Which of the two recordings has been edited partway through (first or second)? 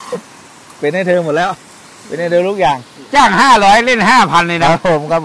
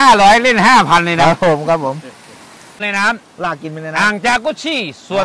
second